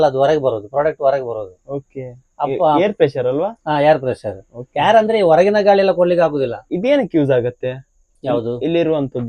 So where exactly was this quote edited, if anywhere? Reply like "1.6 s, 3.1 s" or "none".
6.7 s